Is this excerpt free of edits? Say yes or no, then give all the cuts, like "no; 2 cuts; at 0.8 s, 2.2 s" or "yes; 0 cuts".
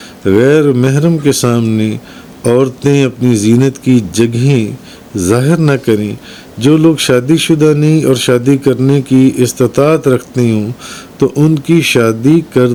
yes; 0 cuts